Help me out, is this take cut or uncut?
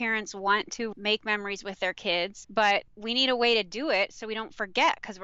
cut